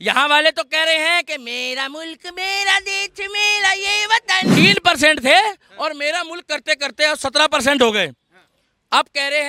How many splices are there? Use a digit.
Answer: 1